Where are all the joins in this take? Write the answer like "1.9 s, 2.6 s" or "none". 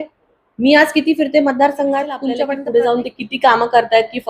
2.3 s